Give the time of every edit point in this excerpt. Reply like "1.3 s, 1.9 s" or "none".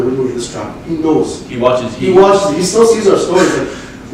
none

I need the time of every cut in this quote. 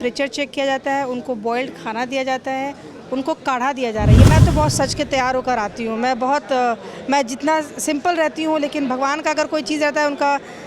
4.3 s

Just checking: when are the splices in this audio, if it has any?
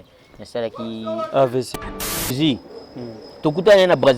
1.7 s

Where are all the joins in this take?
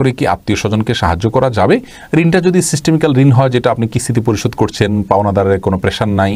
none

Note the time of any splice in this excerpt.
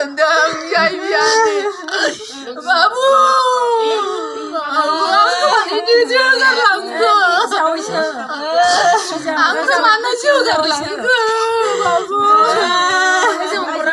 none

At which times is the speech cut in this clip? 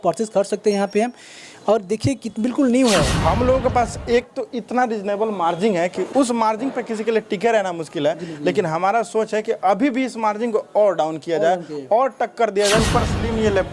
3.1 s, 6.0 s, 12.8 s

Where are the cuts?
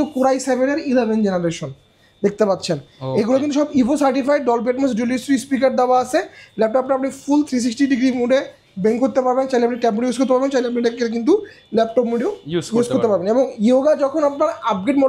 none

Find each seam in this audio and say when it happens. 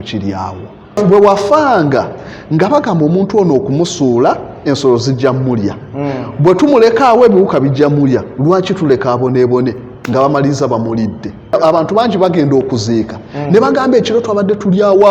1.0 s, 11.6 s

